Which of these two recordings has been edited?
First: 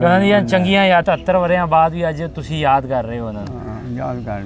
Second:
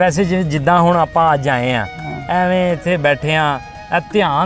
first; 1 cut; at 1.0 s

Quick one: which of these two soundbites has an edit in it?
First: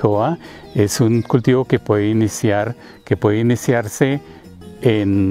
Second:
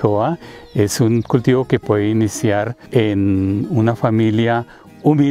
second; 1 cut; at 2.8 s

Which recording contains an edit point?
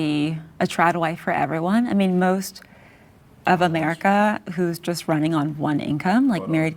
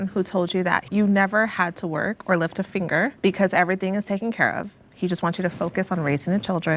second; 2 cuts; at 0.8 s, 3.2 s

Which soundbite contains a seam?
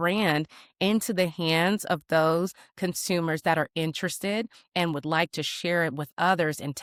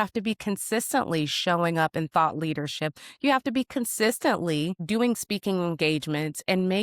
second; 1 cut; at 4.8 s

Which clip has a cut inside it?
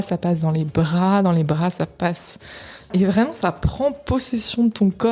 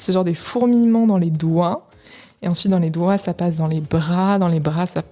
first; 1 cut; at 2.9 s

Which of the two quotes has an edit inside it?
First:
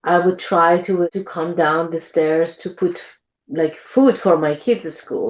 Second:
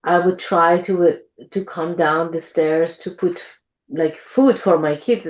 first; 1 cut; at 1.0 s

